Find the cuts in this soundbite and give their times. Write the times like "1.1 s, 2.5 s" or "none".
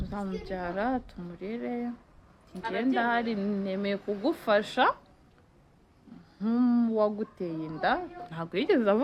none